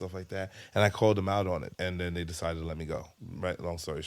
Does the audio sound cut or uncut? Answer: cut